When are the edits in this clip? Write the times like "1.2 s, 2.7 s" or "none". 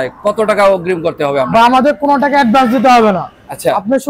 none